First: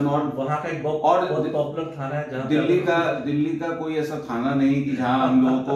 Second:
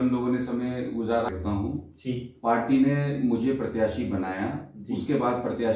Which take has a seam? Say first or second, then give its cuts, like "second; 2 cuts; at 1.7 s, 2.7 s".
second; 1 cut; at 1.3 s